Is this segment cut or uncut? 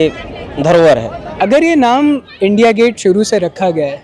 cut